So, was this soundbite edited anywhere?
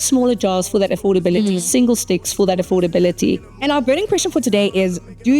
yes; 1 cut; at 3.5 s

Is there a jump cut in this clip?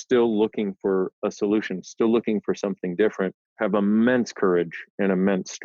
no; 0 cuts

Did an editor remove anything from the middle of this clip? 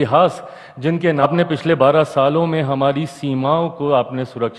yes; 1 cut; at 1.2 s

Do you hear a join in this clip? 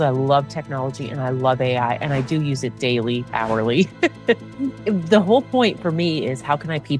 yes; 1 cut; at 4.5 s

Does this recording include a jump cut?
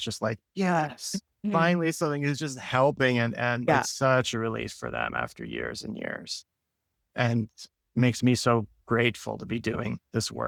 no; 0 cuts

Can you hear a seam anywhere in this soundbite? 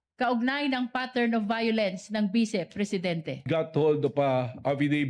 yes; 1 cut; at 3.5 s

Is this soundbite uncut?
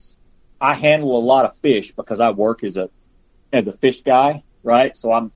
yes; 0 cuts

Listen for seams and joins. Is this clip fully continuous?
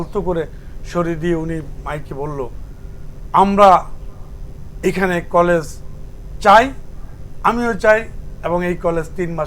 yes; 0 cuts

